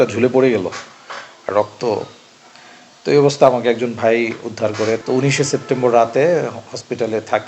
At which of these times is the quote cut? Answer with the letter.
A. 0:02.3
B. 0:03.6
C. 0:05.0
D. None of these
C